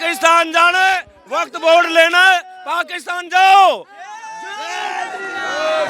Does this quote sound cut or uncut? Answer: uncut